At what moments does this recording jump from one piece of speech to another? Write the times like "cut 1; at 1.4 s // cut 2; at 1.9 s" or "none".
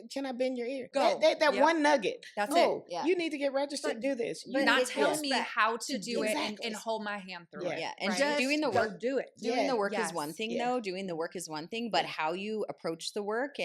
cut 1; at 0.9 s